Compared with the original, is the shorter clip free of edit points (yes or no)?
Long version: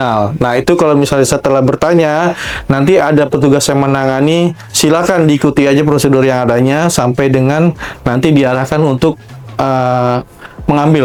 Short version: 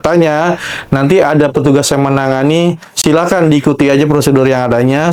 yes